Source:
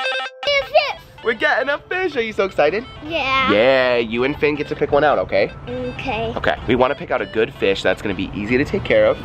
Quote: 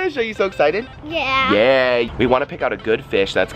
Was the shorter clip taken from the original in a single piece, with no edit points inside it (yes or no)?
no